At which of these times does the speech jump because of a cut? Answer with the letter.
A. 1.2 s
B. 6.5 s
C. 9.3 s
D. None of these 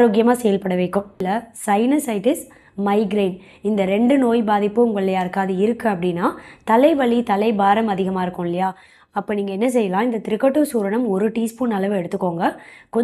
A